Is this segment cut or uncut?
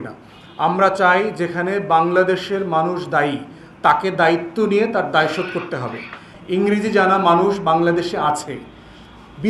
cut